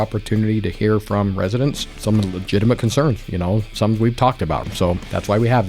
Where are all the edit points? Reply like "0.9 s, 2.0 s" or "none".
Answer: 1.9 s, 4.7 s